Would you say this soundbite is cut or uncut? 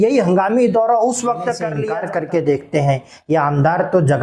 cut